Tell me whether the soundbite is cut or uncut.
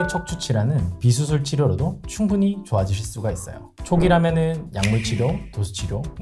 cut